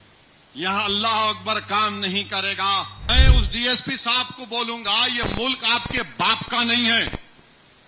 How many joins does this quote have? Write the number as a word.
one